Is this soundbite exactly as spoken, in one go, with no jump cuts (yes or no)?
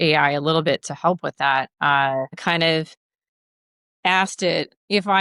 yes